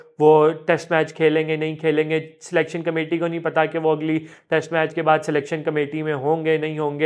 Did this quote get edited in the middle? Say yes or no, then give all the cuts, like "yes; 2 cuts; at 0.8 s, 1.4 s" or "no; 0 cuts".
no; 0 cuts